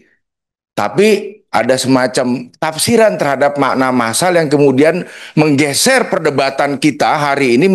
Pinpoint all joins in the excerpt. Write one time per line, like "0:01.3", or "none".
none